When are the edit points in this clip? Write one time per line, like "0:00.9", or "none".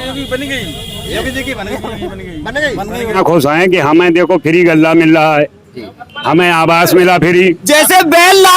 0:03.2
0:07.7